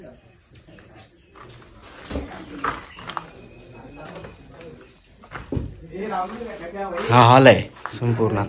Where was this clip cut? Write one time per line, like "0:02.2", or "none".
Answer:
none

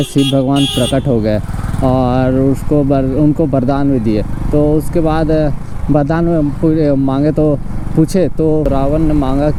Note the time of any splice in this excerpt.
none

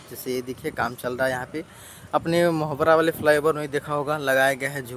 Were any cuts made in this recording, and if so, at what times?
none

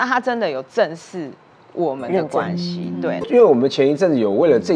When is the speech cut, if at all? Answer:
0:03.2

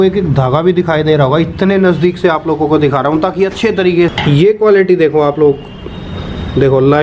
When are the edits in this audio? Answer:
0:04.1

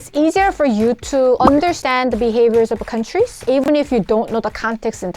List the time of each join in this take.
0:01.5
0:03.4

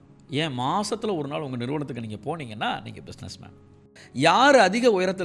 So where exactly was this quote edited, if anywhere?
0:04.0

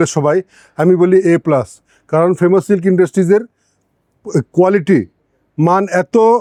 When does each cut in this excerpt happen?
none

